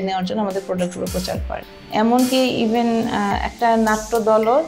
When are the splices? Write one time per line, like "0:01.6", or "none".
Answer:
0:01.6